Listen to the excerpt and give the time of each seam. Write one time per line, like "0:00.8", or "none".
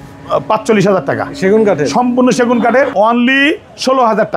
0:02.9